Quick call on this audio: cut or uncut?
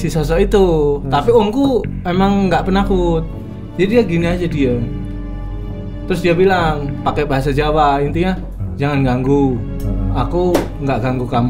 uncut